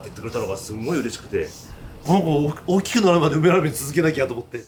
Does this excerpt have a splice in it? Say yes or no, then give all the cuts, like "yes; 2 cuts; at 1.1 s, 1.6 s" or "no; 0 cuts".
no; 0 cuts